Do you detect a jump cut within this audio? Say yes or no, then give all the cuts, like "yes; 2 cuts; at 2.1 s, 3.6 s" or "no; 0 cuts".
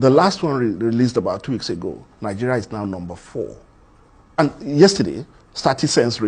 yes; 1 cut; at 4.4 s